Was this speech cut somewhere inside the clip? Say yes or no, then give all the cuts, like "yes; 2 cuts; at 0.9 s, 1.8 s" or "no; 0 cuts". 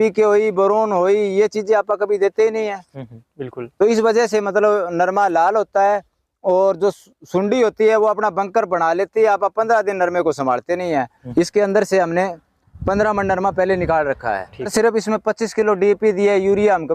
yes; 2 cuts; at 11.2 s, 14.7 s